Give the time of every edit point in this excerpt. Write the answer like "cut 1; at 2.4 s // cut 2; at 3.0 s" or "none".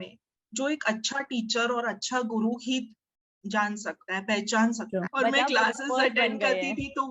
cut 1; at 5.1 s